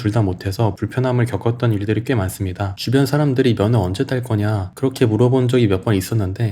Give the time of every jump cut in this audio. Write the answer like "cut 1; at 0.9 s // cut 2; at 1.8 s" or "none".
cut 1; at 2.7 s